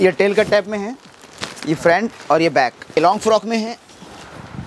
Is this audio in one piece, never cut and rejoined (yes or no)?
no